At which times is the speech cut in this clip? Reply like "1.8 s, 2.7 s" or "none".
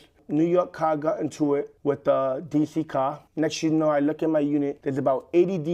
1.7 s, 3.2 s, 4.8 s